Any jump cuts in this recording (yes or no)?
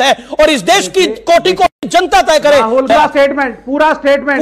yes